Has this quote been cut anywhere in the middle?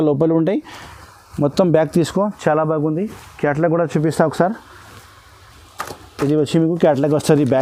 no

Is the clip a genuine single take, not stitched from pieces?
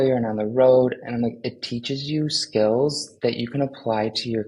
yes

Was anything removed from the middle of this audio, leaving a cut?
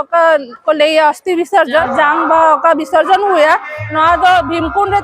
yes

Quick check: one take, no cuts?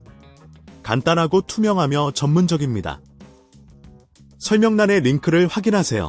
no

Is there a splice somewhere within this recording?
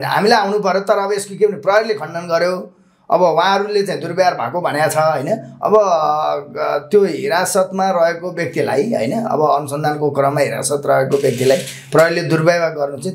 no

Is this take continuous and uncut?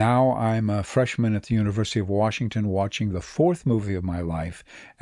yes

